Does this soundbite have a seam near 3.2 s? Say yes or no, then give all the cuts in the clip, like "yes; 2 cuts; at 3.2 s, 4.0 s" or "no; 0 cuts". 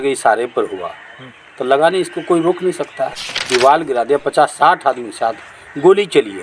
yes; 1 cut; at 3.2 s